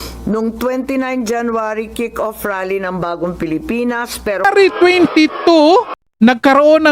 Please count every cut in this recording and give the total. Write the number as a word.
one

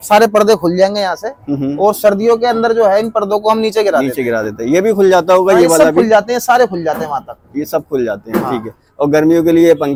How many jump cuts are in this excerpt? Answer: zero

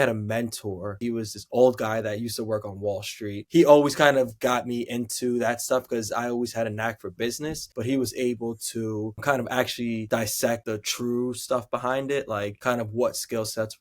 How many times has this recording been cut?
two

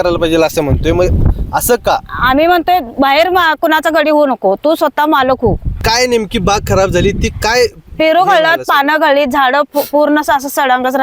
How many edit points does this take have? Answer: one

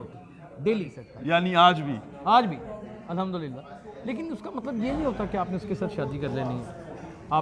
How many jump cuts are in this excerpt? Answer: one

